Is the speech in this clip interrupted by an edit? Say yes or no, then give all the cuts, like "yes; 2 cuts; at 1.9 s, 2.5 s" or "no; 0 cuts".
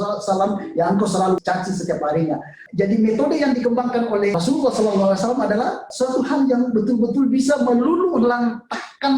yes; 4 cuts; at 1.4 s, 2.6 s, 4.4 s, 5.9 s